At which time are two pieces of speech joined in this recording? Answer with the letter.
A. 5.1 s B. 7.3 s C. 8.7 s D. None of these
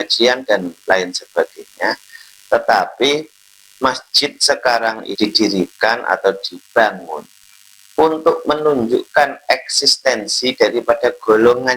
A